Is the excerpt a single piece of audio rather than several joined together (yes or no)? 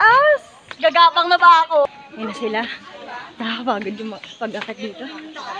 no